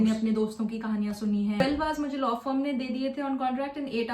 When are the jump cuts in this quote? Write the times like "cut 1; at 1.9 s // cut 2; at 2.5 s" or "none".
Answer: cut 1; at 1.6 s